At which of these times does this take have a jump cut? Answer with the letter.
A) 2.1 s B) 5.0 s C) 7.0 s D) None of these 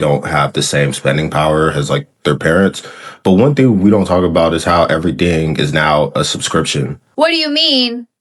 C